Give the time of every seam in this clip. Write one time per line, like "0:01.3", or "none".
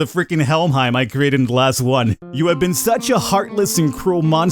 0:02.2